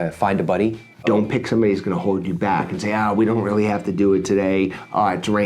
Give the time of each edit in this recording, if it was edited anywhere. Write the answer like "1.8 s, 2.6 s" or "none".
1.0 s